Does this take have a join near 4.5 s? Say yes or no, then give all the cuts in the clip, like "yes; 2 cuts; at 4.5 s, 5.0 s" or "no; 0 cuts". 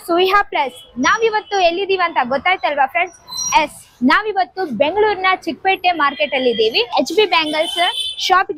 no; 1 cut; at 6.9 s